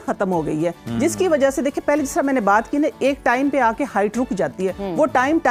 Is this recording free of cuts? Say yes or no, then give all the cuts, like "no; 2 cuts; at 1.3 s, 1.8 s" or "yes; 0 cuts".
yes; 0 cuts